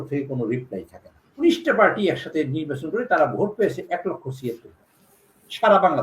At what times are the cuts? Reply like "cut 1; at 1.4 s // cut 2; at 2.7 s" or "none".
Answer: cut 1; at 1.4 s